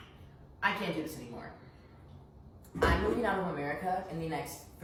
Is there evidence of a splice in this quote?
no; 0 cuts

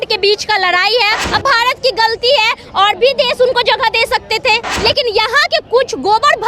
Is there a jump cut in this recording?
yes; 2 cuts; at 1.2 s, 4.7 s

